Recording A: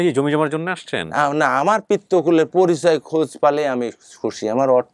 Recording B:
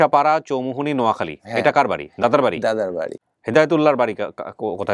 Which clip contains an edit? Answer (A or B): B